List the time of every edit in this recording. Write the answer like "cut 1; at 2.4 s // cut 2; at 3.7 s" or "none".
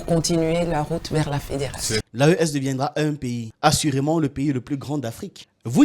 cut 1; at 2.0 s